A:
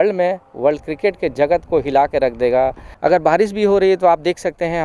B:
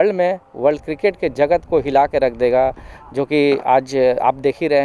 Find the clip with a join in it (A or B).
A